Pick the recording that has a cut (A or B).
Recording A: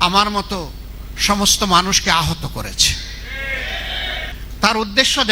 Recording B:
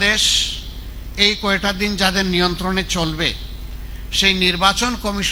A